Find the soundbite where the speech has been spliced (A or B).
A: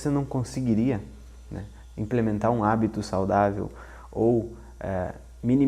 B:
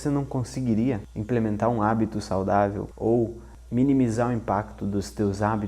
B